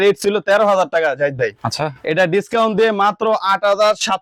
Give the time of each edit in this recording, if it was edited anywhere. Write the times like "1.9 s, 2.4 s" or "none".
none